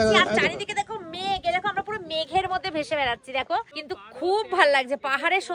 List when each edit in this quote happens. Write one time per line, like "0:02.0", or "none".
0:03.8